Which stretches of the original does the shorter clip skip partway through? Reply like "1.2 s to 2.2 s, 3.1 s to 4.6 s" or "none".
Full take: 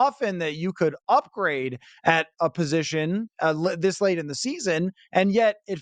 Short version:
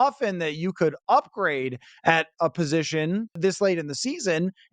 3.4 s to 3.8 s